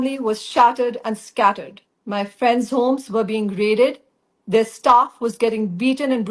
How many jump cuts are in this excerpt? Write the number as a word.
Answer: zero